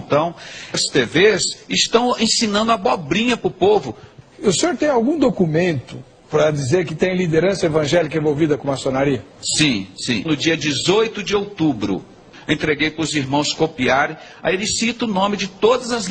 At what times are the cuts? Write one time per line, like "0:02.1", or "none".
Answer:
0:12.3